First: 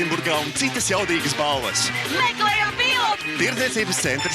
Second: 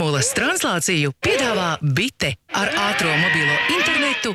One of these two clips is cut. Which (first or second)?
first